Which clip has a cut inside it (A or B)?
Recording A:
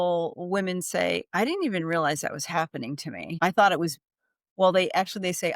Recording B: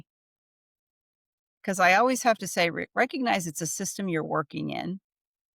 A